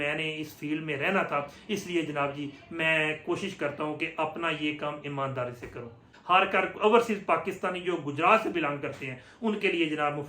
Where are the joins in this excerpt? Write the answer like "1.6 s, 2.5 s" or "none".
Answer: 6.1 s